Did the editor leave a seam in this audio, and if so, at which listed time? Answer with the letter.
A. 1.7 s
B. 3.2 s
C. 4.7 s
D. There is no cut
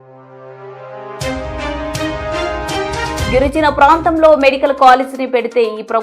B